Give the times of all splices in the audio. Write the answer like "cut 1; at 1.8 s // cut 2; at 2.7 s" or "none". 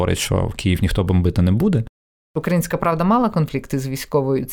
cut 1; at 2.4 s